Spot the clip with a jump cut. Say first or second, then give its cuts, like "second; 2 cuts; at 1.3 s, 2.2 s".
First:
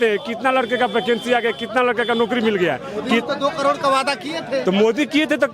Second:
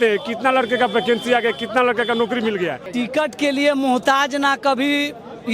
second; 1 cut; at 2.9 s